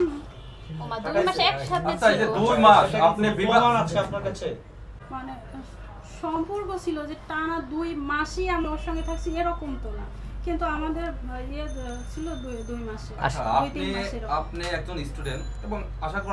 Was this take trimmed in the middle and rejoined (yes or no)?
yes